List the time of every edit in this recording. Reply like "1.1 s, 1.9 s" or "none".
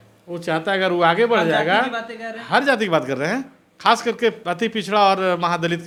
none